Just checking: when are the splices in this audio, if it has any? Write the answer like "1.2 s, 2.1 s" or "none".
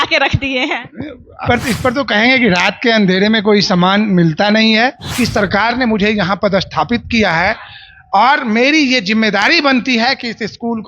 1.3 s, 5.0 s